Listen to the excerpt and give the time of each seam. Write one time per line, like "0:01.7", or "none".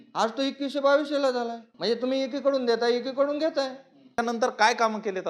0:01.6
0:04.2